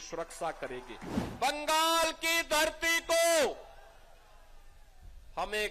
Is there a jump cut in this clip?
yes; 1 cut; at 1.2 s

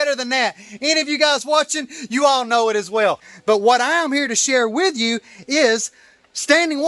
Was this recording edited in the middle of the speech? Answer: yes; 1 cut; at 3.3 s

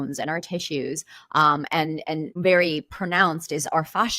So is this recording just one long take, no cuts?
no; 1 cut; at 2.3 s

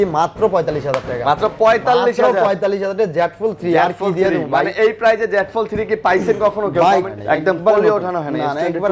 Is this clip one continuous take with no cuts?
no; 1 cut; at 7.1 s

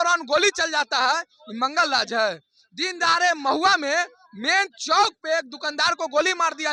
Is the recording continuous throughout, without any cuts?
yes; 0 cuts

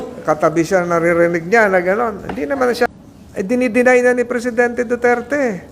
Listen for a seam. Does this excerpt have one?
yes; 1 cut; at 2.9 s

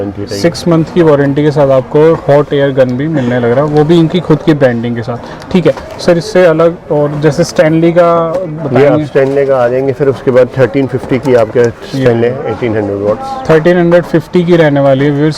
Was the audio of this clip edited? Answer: no; 0 cuts

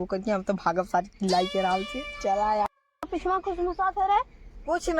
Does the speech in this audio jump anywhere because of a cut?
yes; 1 cut; at 2.7 s

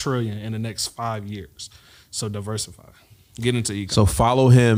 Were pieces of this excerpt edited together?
no; 0 cuts

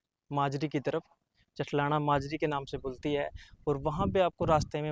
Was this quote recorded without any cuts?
yes; 0 cuts

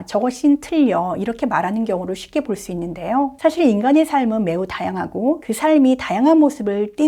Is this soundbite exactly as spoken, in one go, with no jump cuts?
no; 2 cuts; at 3.3 s, 5.5 s

